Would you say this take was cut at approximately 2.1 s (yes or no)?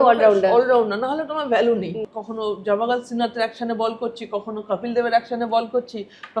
yes